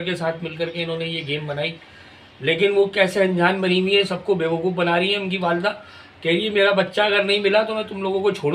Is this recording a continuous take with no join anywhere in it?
yes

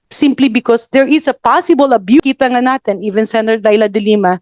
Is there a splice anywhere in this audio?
yes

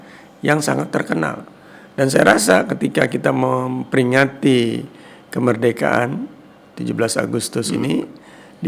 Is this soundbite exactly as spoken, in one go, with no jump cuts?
yes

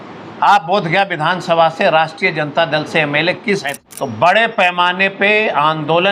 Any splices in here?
yes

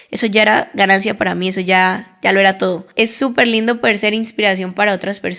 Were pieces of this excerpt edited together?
yes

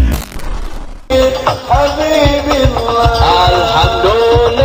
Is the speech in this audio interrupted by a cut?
no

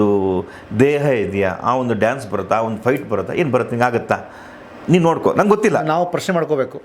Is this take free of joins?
yes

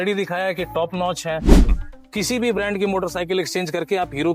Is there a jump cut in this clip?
yes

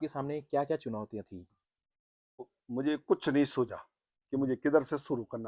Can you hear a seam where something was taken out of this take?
yes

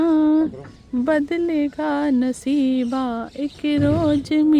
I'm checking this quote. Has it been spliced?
no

